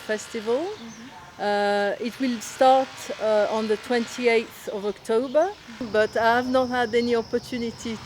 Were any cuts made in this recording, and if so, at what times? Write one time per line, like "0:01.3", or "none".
0:05.8